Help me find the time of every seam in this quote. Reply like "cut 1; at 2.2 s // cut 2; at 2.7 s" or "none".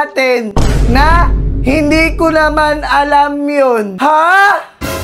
cut 1; at 3.9 s